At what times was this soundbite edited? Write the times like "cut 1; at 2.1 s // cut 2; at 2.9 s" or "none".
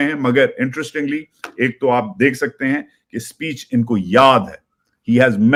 none

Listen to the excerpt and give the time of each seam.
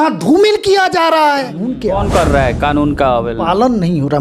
cut 1; at 1.7 s

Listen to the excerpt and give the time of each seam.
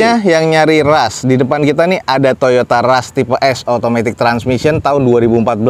none

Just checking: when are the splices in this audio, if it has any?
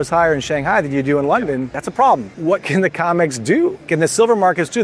cut 1; at 1.8 s // cut 2; at 2.3 s // cut 3; at 3.9 s

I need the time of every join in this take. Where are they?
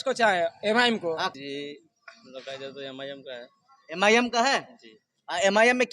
cut 1; at 1.3 s

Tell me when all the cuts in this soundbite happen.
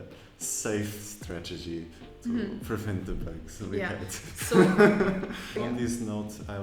cut 1; at 5.5 s

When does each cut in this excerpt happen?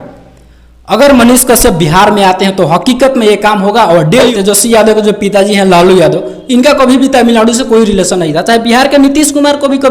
cut 1; at 4.3 s

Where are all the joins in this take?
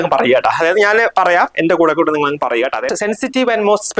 cut 1; at 2.9 s

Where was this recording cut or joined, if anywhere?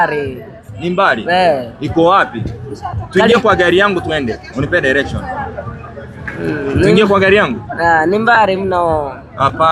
none

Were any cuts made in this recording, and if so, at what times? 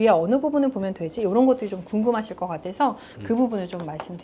none

